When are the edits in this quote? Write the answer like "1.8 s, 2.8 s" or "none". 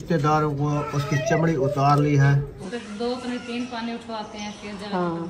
2.5 s